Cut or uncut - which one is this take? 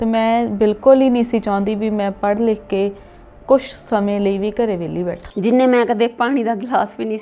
cut